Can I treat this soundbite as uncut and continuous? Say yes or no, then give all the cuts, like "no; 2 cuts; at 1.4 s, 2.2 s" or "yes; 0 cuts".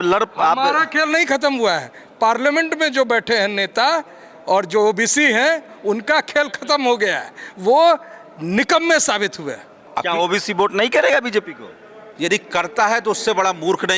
no; 1 cut; at 9.9 s